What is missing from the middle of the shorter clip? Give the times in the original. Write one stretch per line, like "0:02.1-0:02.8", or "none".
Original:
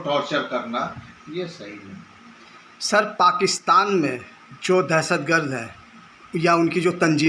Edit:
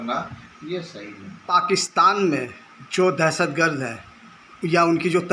0:02.2-0:03.2